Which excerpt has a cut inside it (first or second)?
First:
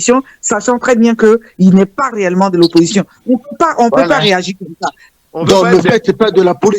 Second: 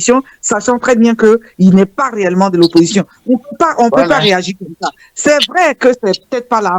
first